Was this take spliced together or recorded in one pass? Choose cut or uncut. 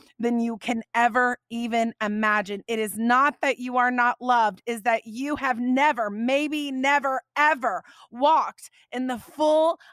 uncut